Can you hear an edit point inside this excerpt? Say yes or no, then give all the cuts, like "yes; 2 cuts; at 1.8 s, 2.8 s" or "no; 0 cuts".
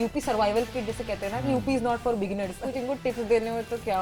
yes; 1 cut; at 2.6 s